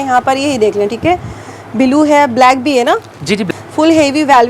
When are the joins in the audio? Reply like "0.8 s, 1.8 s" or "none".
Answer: 3.4 s